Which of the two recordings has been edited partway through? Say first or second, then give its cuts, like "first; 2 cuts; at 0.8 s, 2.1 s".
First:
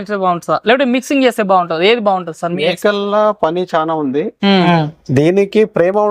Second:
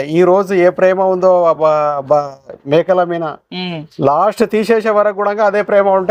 first; 1 cut; at 4.6 s